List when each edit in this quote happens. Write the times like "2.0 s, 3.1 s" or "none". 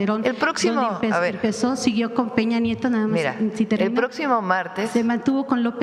none